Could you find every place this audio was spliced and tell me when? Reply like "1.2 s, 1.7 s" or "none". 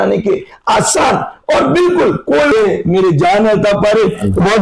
2.5 s

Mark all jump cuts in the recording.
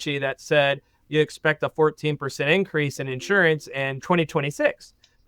4.0 s

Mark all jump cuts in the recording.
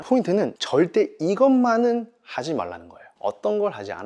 none

